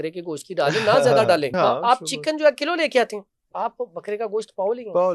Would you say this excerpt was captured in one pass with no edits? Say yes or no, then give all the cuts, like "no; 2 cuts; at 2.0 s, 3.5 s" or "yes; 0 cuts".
no; 1 cut; at 1.5 s